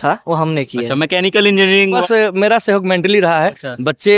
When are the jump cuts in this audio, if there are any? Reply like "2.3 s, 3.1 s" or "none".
2.0 s